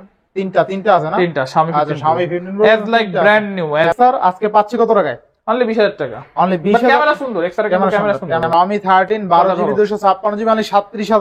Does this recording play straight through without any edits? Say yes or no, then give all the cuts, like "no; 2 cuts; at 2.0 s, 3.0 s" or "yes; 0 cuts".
no; 2 cuts; at 3.8 s, 8.4 s